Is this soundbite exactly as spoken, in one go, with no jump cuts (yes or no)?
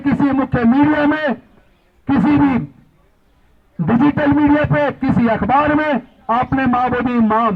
yes